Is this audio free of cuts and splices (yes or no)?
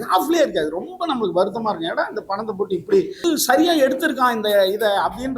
no